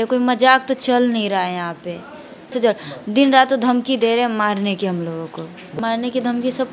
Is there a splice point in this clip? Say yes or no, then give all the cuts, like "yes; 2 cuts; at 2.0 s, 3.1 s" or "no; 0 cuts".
yes; 2 cuts; at 2.6 s, 5.7 s